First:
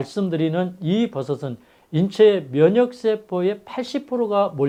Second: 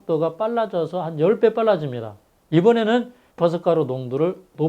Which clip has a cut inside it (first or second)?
second